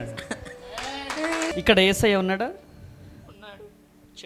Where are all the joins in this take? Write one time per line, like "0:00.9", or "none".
0:01.5